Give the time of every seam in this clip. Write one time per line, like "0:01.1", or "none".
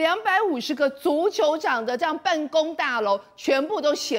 none